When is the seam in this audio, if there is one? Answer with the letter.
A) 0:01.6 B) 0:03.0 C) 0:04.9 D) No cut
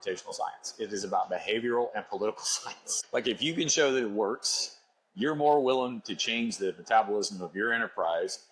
B